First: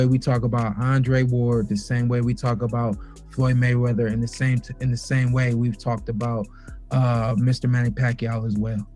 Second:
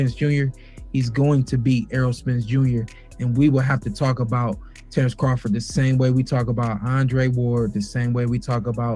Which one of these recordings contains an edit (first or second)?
second